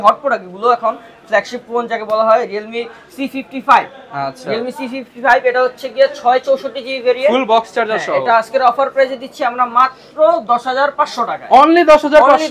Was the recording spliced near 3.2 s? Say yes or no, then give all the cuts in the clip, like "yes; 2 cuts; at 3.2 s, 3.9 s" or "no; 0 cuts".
no; 0 cuts